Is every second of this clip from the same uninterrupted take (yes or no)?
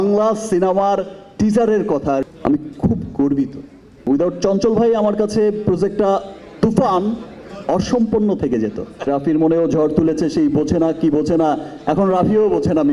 no